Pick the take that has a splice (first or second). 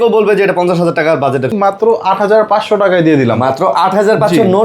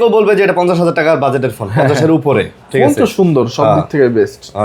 first